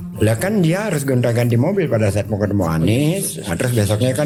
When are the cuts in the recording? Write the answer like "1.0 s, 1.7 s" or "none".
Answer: none